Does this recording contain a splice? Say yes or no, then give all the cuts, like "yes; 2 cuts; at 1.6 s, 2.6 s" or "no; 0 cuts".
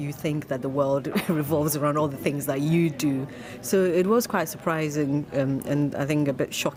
no; 0 cuts